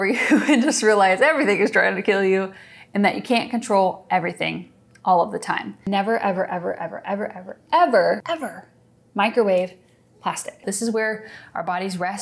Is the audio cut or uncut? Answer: cut